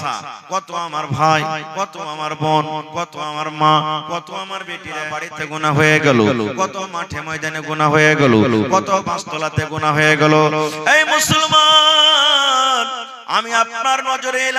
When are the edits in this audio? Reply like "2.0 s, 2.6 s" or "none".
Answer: 5.1 s